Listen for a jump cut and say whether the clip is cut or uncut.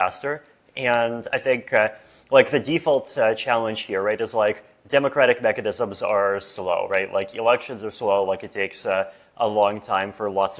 uncut